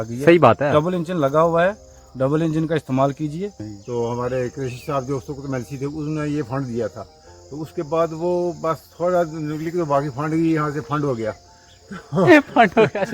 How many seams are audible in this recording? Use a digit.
1